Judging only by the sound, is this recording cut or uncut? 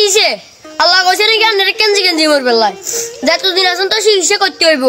uncut